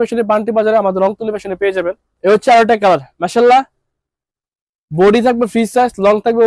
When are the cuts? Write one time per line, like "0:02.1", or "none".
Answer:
none